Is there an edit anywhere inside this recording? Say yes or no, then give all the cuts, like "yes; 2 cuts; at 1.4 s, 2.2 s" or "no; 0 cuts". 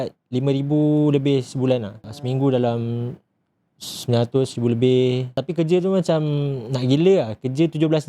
yes; 2 cuts; at 2.1 s, 5.4 s